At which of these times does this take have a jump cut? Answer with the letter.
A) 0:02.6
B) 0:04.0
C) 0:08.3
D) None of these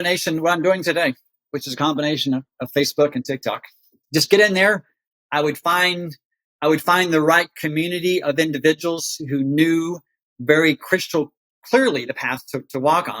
B